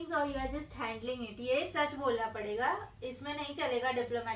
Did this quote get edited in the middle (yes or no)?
no